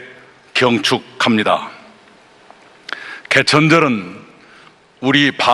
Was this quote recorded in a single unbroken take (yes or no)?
no